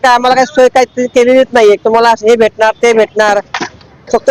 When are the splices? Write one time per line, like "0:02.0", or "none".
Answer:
none